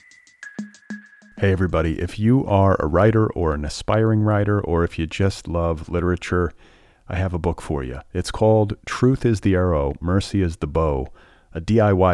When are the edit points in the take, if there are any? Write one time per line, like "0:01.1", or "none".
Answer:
0:01.0

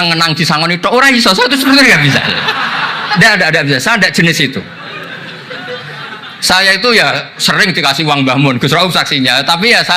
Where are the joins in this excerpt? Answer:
none

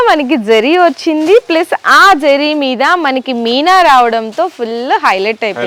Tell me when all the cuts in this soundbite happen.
none

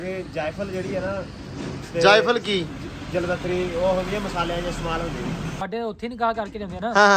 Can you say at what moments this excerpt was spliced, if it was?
0:05.5

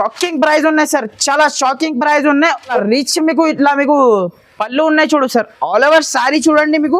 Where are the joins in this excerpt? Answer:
0:02.7

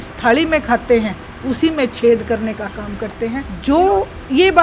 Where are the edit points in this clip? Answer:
0:03.5

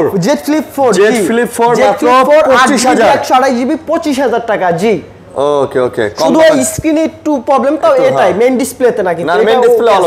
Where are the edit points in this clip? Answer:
none

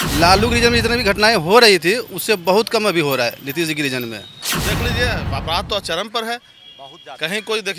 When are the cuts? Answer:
0:04.5

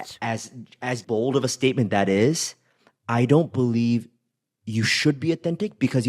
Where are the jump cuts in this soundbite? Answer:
0:01.0

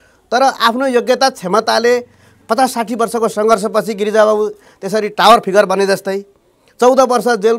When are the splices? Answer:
none

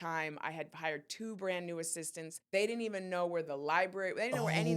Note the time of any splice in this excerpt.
0:02.3

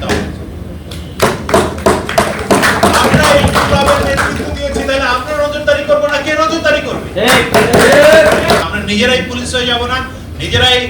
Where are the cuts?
0:08.6

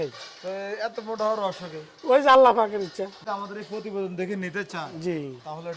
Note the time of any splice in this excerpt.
0:03.2

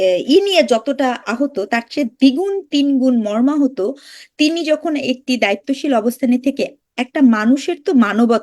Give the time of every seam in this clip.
none

